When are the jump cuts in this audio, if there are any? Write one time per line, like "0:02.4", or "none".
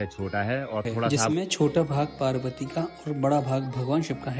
0:01.2